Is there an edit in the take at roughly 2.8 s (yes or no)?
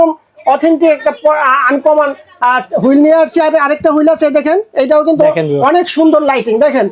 no